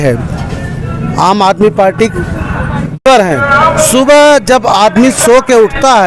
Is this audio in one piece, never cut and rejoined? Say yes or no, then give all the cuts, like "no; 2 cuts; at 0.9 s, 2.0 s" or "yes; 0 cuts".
no; 1 cut; at 3.0 s